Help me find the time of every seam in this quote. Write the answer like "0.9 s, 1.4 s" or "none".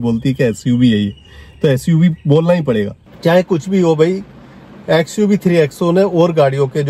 3.1 s